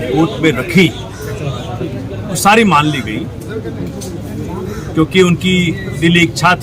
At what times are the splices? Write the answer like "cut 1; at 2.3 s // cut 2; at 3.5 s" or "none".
none